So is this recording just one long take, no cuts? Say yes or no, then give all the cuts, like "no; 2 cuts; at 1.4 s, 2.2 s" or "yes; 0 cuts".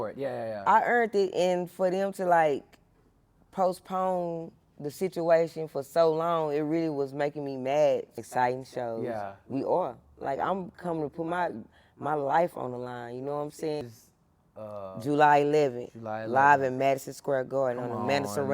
no; 2 cuts; at 8.2 s, 14.0 s